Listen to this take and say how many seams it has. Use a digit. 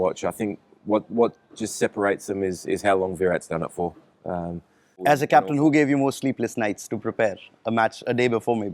1